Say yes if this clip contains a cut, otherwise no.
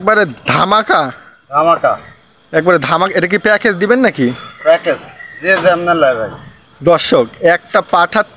no